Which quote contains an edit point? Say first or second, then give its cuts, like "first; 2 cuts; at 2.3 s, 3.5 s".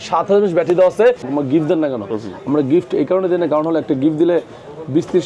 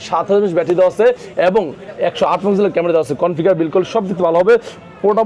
first; 1 cut; at 1.3 s